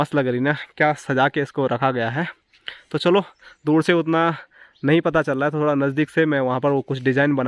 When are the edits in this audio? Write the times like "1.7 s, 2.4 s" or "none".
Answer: none